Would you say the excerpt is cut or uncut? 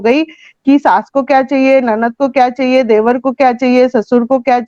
uncut